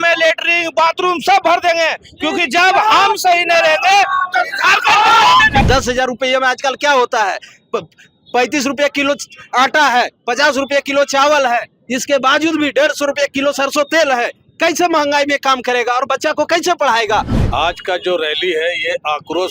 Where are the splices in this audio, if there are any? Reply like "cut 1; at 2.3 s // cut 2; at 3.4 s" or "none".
cut 1; at 5.6 s // cut 2; at 17.4 s